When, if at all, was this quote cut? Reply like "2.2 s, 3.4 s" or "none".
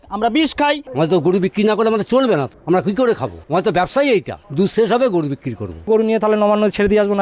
0.8 s, 2.5 s, 3.3 s, 4.4 s, 5.9 s